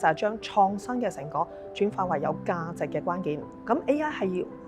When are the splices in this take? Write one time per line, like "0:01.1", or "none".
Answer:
0:03.5